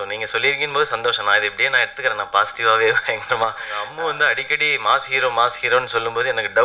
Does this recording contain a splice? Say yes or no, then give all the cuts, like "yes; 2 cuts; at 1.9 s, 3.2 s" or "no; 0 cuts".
yes; 1 cut; at 3.9 s